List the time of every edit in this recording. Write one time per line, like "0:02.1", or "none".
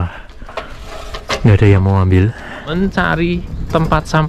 0:02.7